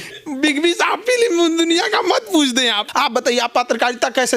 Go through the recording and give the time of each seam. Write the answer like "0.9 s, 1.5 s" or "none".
2.8 s

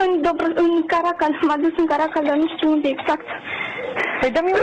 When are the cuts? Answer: none

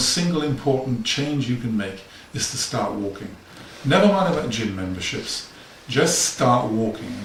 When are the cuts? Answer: none

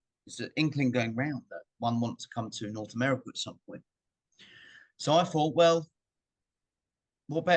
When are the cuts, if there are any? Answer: none

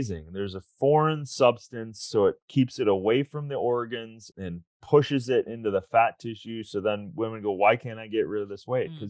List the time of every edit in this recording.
4.3 s

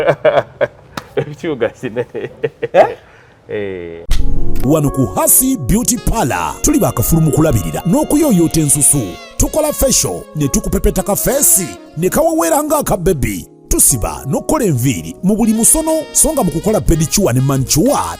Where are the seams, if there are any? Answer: 4.0 s

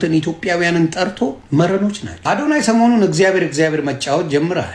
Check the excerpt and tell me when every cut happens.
1.4 s

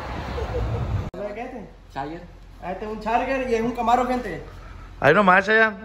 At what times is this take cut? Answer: 1.1 s

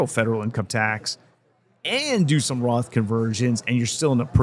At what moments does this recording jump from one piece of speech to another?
none

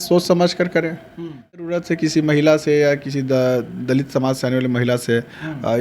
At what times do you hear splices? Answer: 1.6 s

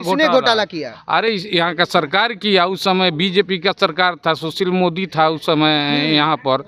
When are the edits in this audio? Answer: none

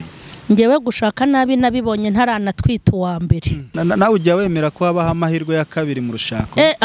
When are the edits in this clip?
3.6 s

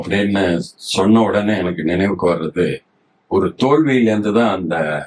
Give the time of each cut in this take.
none

